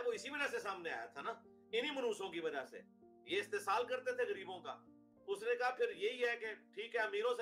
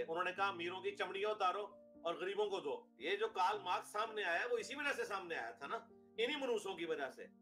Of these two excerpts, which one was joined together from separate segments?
second; 1 cut; at 2.9 s

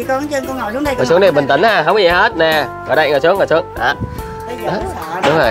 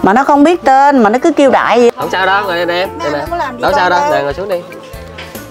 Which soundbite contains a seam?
second; 1 cut; at 1.9 s

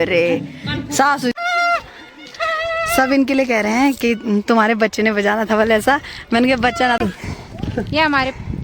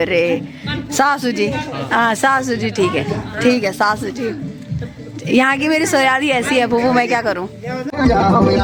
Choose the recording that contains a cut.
first; 2 cuts; at 1.3 s, 7.0 s

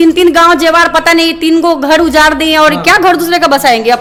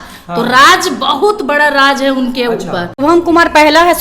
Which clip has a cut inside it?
second; 1 cut; at 2.9 s

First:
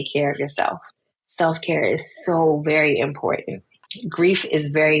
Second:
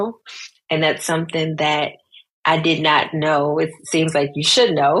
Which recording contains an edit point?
first; 1 cut; at 4.0 s

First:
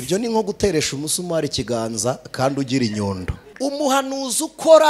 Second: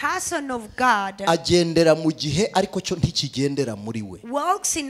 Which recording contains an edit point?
first; 1 cut; at 3.4 s

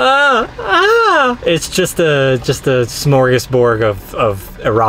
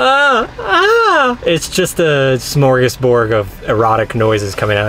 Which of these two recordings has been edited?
second; 2 cuts; at 2.4 s, 3.5 s

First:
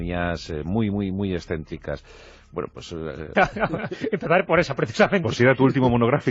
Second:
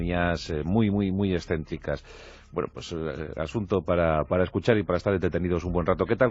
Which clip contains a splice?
second; 1 cut; at 3.3 s

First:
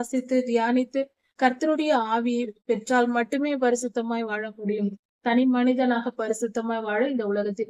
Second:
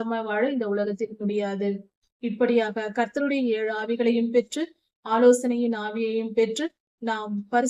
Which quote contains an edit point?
first; 1 cut; at 2.5 s

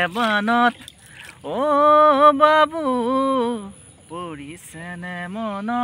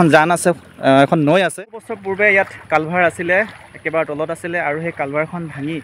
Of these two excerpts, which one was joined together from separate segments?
second; 1 cut; at 1.5 s

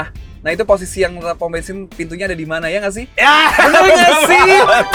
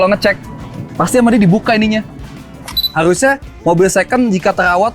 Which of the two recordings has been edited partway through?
second; 1 cut; at 2.8 s

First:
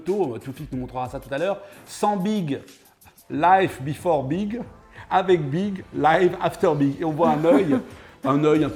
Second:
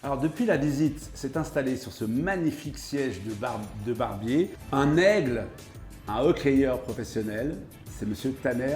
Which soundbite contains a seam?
second; 1 cut; at 4.6 s

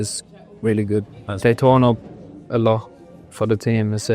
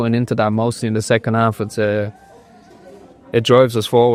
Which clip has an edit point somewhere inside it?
first; 1 cut; at 1.2 s

